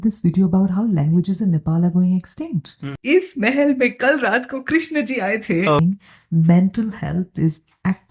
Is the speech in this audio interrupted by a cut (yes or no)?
yes